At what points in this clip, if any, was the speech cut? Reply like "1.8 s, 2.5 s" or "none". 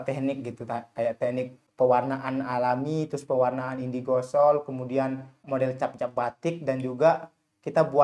1.6 s, 5.4 s